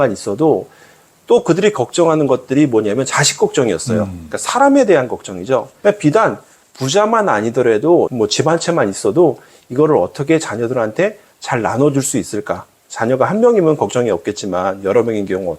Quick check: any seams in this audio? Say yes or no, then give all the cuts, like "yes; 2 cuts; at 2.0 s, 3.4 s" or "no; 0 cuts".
yes; 1 cut; at 5.7 s